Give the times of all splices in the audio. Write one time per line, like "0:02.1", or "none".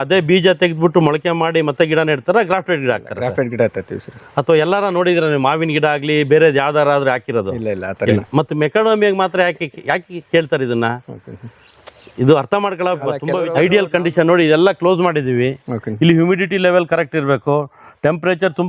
0:13.5